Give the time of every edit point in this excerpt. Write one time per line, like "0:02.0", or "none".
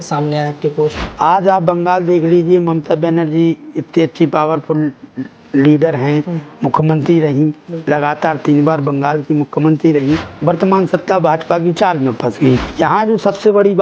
0:01.0
0:10.3
0:12.7